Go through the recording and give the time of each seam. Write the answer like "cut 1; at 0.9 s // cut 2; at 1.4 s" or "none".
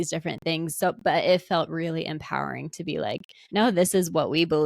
cut 1; at 3.3 s